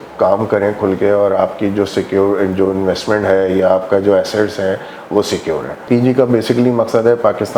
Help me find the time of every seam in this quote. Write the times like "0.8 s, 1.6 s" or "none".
5.8 s